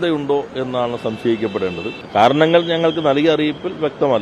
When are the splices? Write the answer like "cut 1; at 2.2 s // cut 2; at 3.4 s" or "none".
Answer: cut 1; at 1.9 s